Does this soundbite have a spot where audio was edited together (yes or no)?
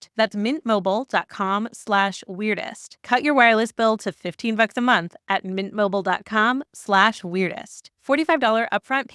no